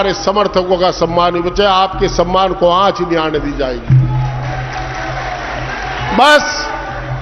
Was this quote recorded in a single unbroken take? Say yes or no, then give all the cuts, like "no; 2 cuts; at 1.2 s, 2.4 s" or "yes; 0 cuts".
yes; 0 cuts